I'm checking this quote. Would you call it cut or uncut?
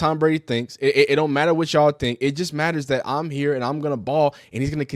uncut